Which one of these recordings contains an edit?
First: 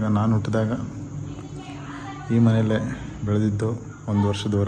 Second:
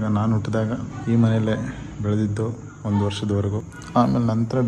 second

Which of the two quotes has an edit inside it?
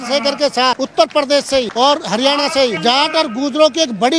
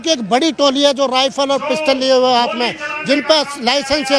first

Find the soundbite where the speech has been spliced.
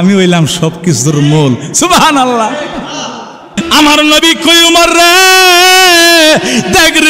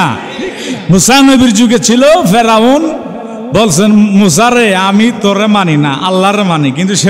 first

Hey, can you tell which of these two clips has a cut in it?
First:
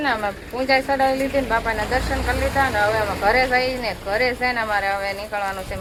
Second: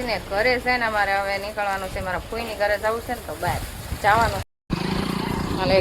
second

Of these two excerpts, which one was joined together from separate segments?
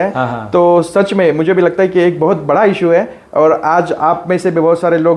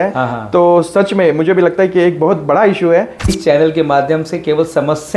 second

